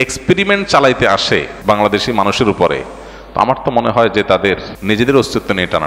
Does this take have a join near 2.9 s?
no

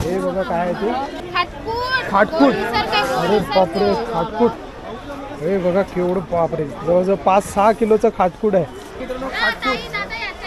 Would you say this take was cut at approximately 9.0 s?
yes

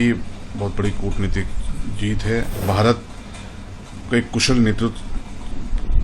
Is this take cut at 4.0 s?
no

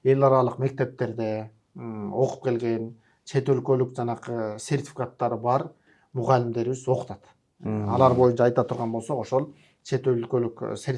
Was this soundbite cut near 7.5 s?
no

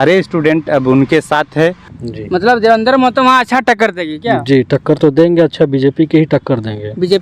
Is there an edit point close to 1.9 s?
yes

